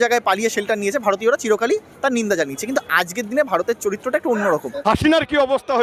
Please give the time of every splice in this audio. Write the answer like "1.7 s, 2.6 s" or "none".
4.7 s